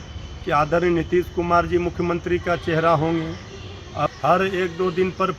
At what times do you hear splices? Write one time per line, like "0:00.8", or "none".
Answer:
0:04.1